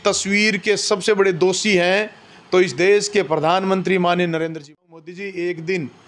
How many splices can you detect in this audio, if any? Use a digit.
1